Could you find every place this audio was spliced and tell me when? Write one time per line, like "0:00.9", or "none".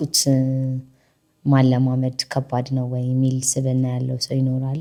none